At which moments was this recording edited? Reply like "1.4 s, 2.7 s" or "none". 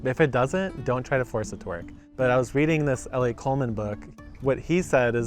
2.0 s, 4.0 s